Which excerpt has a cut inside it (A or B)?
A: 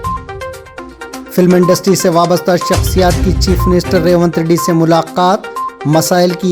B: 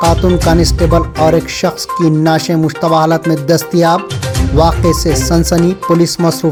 A